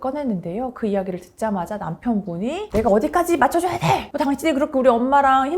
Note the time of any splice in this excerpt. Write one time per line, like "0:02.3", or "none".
0:02.7